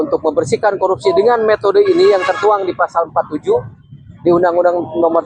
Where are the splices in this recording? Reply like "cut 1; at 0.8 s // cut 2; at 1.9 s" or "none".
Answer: none